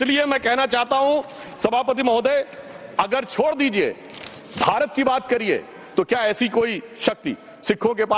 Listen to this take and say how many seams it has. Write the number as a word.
zero